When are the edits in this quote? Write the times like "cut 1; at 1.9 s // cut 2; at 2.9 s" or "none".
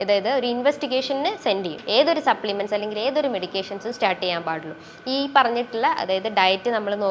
cut 1; at 1.8 s